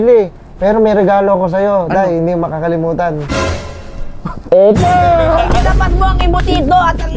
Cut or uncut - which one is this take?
uncut